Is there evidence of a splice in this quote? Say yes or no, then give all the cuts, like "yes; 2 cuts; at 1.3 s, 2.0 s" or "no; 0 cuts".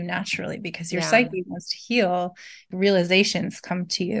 yes; 1 cut; at 2.7 s